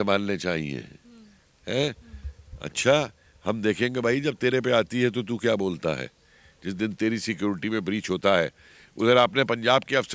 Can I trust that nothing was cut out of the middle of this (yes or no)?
yes